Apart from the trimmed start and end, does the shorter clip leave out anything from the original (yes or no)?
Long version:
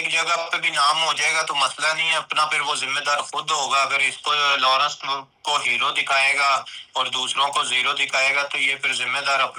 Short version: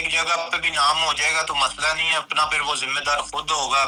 no